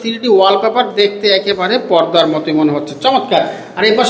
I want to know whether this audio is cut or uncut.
uncut